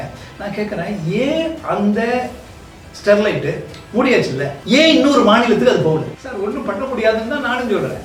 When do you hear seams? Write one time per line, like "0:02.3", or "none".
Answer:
0:04.5
0:06.1

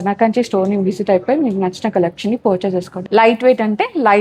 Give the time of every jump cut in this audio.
0:02.9

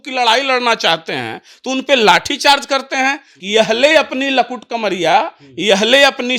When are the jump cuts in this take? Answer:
0:03.3

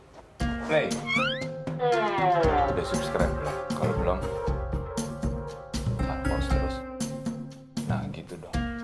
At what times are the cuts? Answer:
0:01.3

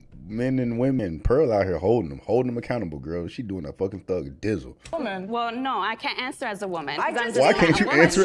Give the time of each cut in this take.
0:01.0

